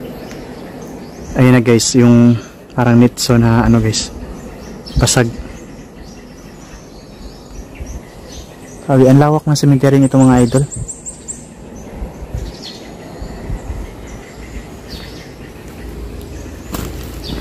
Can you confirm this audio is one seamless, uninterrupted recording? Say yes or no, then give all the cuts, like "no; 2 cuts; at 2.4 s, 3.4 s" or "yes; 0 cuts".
yes; 0 cuts